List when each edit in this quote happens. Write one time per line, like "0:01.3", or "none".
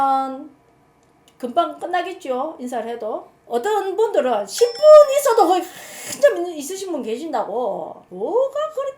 0:03.4
0:08.0